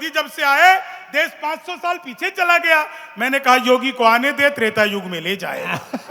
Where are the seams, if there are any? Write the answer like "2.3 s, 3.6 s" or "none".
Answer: none

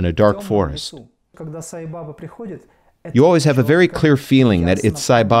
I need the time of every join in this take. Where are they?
1.4 s

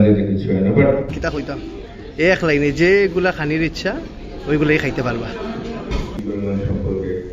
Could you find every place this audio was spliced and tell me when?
1.2 s, 6.1 s

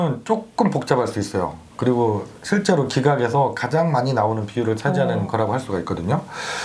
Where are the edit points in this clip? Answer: none

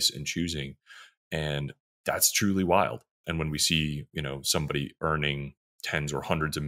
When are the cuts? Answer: 3.2 s

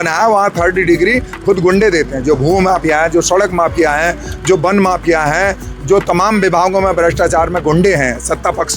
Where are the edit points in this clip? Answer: none

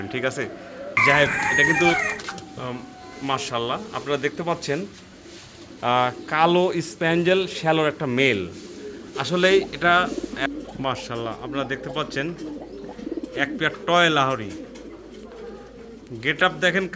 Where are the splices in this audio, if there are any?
1.9 s, 10.1 s

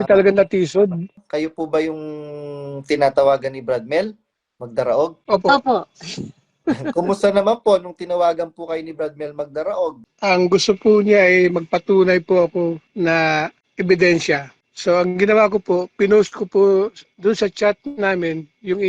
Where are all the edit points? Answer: 1.1 s

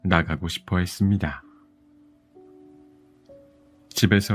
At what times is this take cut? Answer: 1.4 s, 3.5 s

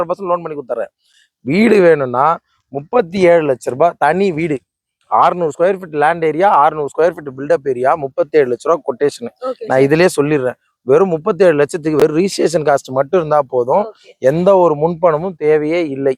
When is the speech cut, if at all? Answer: none

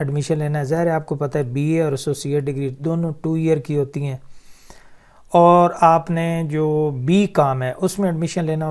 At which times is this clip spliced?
none

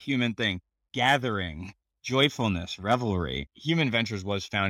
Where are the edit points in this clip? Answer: 3.4 s

